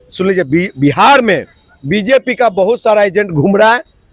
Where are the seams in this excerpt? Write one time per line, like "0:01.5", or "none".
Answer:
none

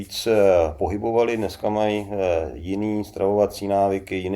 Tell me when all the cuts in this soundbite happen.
none

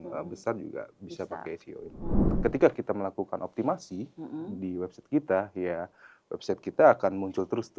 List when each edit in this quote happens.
0:02.2

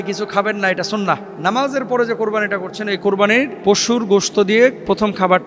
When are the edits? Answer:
0:01.3
0:03.5

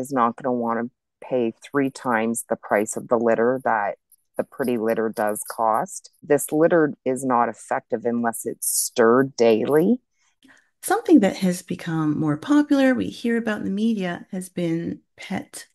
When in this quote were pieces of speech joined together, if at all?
0:06.2
0:10.4

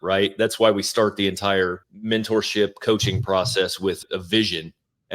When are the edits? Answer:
0:01.9
0:04.0

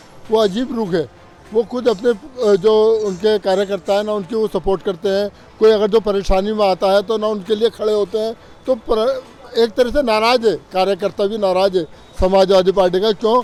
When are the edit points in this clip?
none

